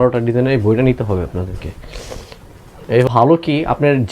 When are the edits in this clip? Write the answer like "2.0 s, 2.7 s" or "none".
3.1 s